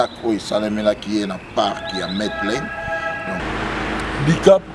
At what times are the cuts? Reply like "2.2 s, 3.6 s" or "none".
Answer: 3.4 s

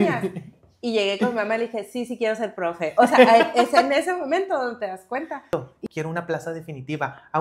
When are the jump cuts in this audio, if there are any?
5.7 s

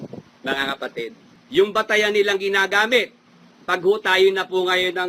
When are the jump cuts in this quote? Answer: 1.3 s

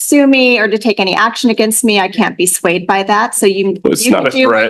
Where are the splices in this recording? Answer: none

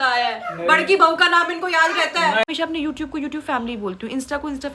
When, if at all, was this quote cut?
2.5 s

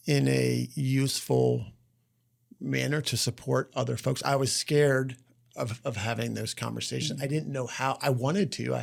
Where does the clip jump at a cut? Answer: none

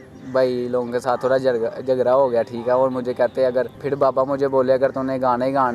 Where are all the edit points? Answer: 3.8 s

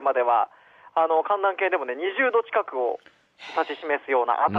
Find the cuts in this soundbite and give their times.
none

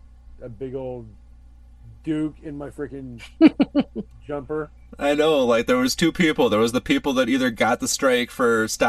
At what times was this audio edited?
none

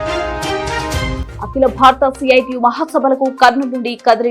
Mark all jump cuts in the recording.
1.2 s

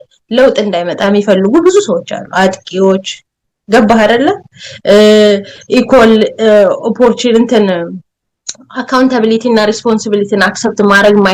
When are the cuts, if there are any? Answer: none

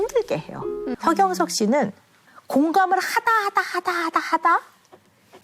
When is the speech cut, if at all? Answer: 1.0 s

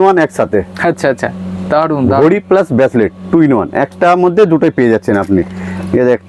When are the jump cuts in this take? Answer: none

